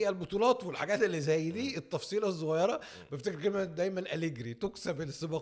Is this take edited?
no; 0 cuts

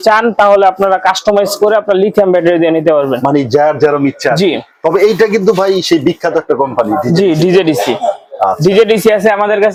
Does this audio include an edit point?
no; 0 cuts

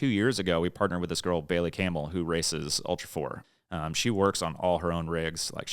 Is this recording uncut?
no; 1 cut; at 3.4 s

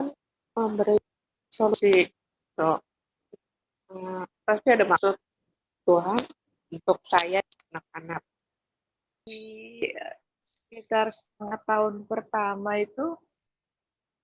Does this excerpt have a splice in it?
yes; 1 cut; at 9.3 s

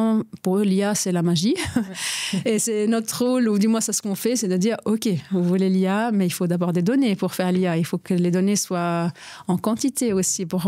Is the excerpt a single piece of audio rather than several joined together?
yes; 0 cuts

